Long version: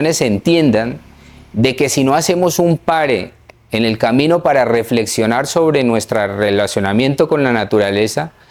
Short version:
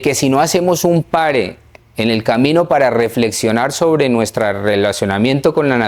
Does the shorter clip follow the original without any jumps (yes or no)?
yes